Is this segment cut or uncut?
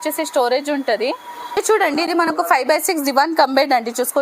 cut